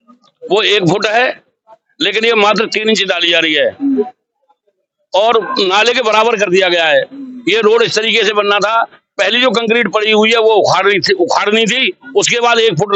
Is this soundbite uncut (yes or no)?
yes